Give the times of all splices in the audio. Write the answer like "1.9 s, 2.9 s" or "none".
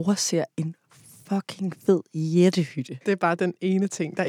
2.9 s